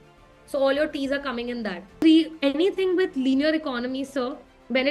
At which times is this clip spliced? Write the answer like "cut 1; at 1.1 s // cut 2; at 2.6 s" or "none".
none